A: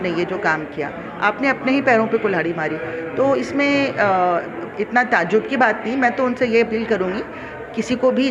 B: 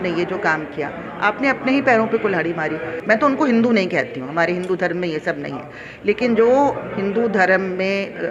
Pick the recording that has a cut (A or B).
B